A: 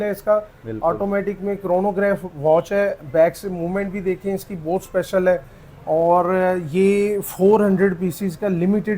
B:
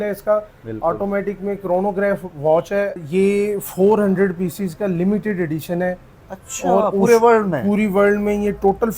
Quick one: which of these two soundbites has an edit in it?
B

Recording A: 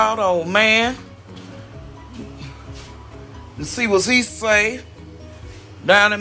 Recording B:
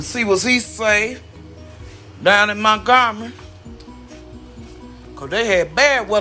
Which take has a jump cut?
B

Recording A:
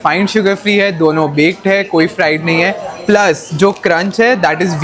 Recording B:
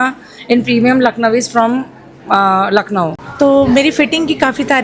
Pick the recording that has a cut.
B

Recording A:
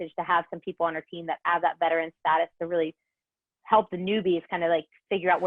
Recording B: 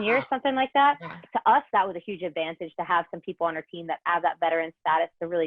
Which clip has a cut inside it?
B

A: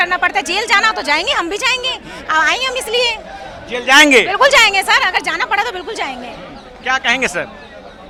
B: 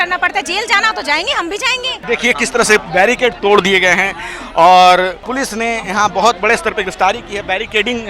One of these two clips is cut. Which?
B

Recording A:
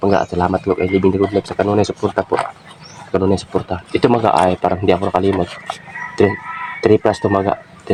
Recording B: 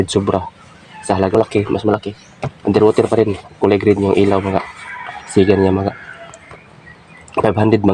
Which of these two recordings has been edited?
B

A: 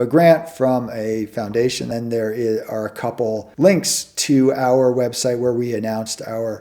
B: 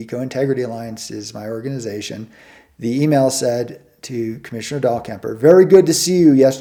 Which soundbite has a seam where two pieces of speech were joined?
A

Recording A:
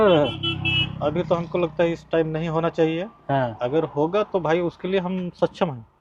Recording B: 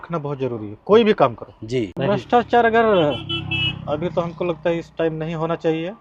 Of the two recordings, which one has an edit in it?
B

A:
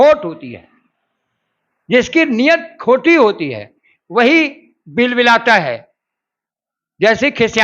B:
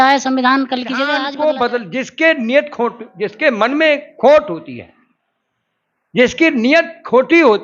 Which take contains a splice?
B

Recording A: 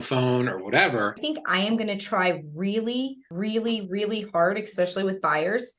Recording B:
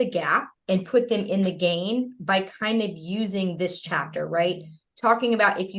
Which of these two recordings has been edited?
A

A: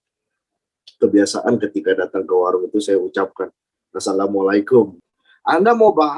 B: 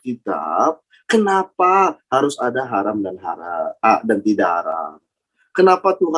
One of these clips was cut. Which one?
A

